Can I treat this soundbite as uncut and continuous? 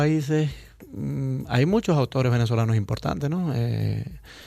no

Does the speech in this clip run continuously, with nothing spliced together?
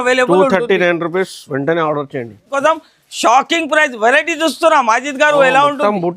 no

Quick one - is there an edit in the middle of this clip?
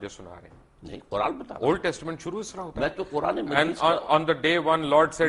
no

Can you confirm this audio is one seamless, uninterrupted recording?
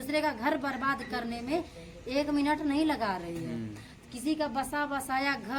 yes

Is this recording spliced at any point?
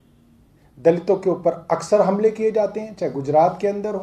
no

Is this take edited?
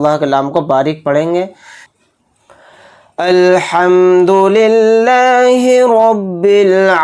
yes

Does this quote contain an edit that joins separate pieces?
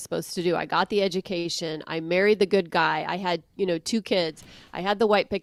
no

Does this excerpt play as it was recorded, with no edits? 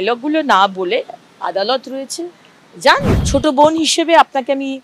no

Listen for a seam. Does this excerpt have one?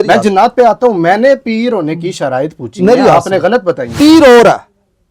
yes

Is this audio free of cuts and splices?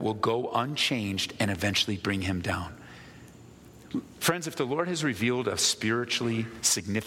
yes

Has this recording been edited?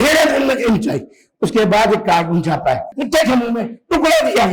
yes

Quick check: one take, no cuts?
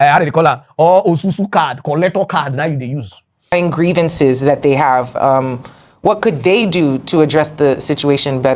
no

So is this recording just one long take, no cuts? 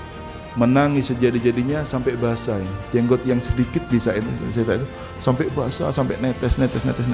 yes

